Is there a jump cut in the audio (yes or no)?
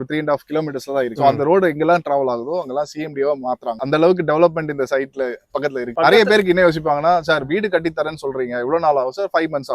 no